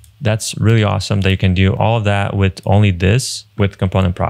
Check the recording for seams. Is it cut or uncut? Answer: cut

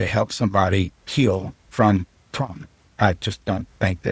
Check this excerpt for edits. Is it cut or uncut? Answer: uncut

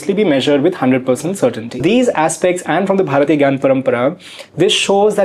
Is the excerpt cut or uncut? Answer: cut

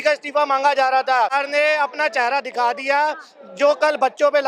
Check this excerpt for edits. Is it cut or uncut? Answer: cut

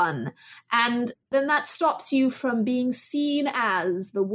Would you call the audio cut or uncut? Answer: uncut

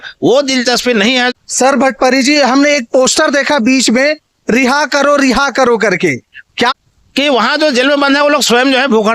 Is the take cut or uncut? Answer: cut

